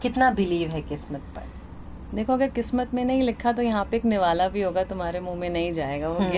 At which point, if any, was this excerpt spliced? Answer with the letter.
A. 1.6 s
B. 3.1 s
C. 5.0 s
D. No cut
D